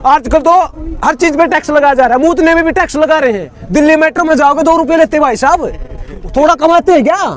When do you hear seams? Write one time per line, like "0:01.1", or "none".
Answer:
none